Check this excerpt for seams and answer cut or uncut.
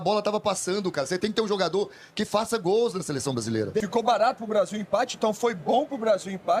uncut